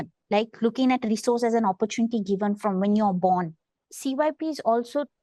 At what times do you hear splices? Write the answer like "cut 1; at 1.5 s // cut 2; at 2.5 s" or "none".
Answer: cut 1; at 3.6 s